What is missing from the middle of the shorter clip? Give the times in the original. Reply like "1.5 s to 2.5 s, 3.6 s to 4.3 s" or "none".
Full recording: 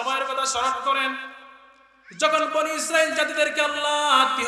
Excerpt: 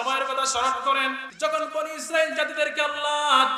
1.3 s to 2.1 s